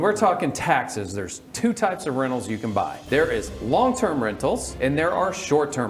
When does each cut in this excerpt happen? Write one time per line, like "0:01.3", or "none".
0:03.0
0:04.7